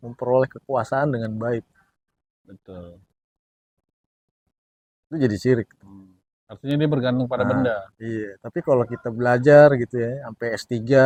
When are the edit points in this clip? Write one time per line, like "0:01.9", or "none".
none